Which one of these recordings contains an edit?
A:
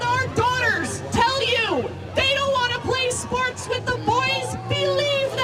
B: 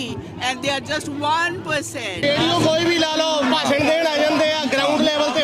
B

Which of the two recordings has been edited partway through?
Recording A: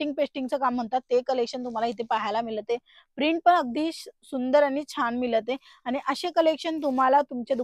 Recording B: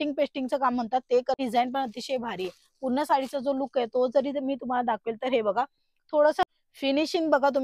B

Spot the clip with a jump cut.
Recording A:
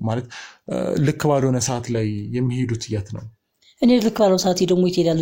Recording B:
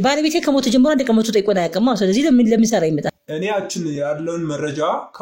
B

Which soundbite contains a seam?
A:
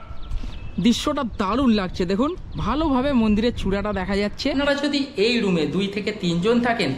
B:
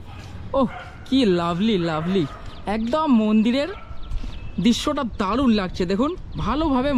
A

